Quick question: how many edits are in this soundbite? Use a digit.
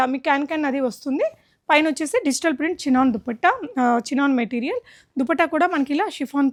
0